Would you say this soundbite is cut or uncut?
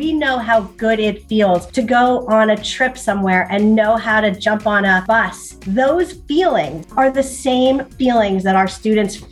cut